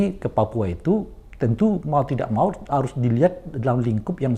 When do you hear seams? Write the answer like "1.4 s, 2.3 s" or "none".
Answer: none